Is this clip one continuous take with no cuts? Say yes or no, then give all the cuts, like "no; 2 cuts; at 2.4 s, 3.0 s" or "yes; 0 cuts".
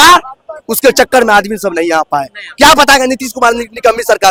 yes; 0 cuts